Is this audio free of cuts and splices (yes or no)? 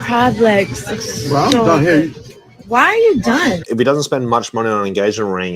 no